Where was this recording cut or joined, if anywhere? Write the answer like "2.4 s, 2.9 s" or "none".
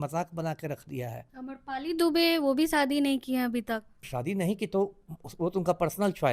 1.3 s, 4.0 s